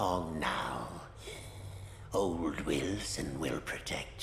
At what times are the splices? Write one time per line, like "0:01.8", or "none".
none